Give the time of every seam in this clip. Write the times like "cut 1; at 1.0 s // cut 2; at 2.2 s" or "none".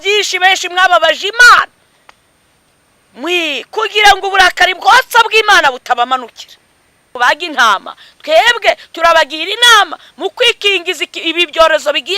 cut 1; at 7.2 s